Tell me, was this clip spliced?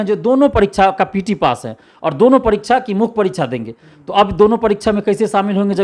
no; 0 cuts

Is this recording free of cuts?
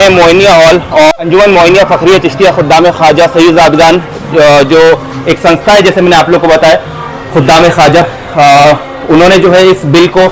no; 1 cut; at 1.1 s

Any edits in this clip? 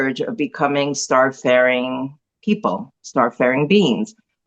no; 0 cuts

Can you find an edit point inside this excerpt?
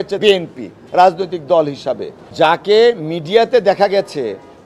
yes; 1 cut; at 2.2 s

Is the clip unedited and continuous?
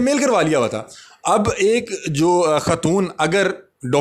yes; 0 cuts

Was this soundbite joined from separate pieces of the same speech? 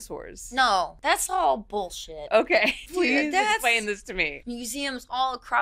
yes; 3 cuts; at 1.0 s, 2.8 s, 4.4 s

